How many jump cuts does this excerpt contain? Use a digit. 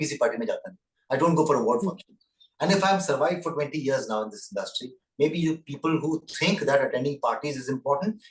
0